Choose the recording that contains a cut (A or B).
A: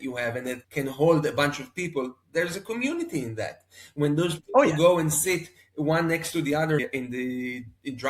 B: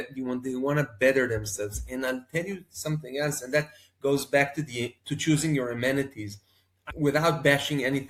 A